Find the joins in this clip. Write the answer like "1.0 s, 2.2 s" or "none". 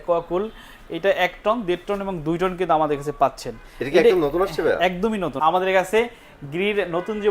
5.3 s